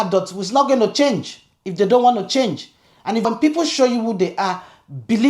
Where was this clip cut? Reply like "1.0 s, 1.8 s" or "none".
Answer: 3.2 s